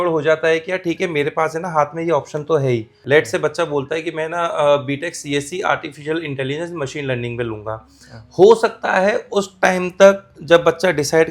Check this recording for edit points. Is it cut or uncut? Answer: cut